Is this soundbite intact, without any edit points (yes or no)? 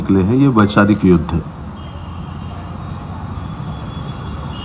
yes